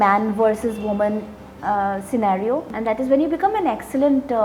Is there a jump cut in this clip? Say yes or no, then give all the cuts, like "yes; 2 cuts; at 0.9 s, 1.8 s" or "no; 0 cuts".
yes; 1 cut; at 2.7 s